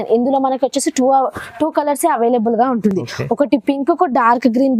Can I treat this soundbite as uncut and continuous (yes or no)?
yes